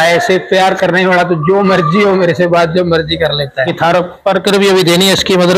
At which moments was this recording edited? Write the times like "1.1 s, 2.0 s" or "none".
3.7 s